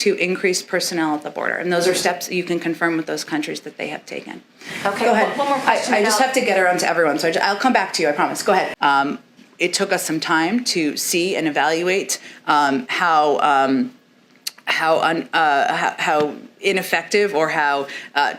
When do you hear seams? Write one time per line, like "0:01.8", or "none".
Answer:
0:08.7